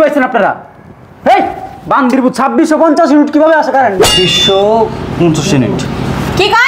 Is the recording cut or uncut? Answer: cut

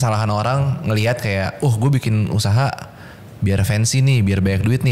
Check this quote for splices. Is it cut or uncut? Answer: uncut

